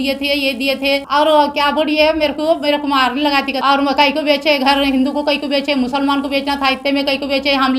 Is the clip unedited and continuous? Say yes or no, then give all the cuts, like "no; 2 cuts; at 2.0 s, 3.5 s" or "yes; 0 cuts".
no; 2 cuts; at 1.1 s, 3.6 s